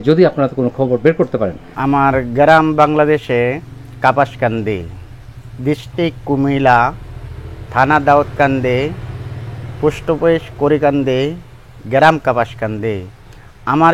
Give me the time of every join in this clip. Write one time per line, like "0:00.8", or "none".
0:01.7